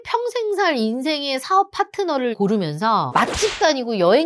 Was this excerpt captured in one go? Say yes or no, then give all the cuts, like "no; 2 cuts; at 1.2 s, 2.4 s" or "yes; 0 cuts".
yes; 0 cuts